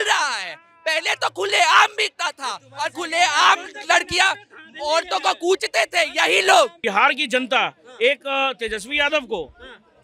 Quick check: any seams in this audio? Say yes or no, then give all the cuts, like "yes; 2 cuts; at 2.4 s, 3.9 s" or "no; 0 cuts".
yes; 1 cut; at 6.8 s